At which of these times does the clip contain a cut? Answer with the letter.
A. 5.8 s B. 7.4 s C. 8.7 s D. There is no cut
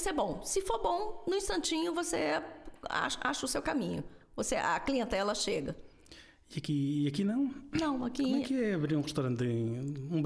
D